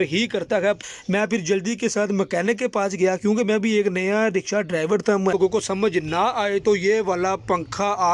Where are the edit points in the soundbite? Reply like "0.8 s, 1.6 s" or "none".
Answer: 0.8 s, 5.3 s